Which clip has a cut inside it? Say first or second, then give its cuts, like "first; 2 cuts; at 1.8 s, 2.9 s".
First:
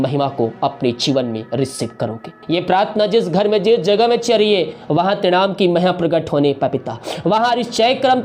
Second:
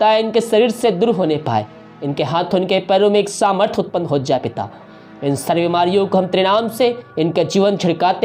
first; 1 cut; at 2.3 s